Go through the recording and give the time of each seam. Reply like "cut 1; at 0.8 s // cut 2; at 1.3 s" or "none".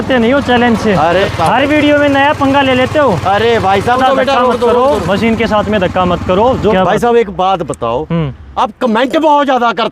cut 1; at 1.2 s // cut 2; at 4.0 s // cut 3; at 6.7 s // cut 4; at 8.4 s